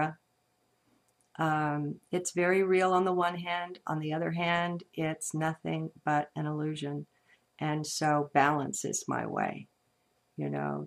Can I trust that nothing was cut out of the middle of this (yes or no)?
no